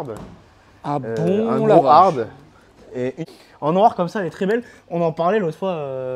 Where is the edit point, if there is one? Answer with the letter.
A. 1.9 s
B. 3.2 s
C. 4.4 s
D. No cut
B